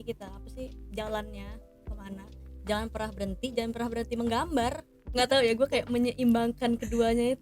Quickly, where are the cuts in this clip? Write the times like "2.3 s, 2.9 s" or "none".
5.1 s